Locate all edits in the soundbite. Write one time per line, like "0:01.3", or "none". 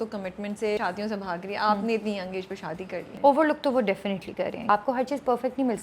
0:00.8
0:03.1
0:04.7

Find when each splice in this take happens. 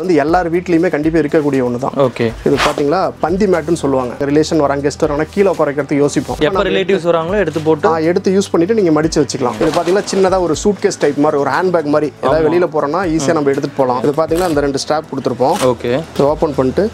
0:04.2
0:06.4
0:09.5
0:14.0

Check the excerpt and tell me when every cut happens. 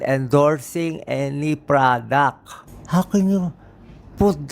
0:02.6

